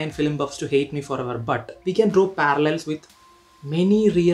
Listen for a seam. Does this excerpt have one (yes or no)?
yes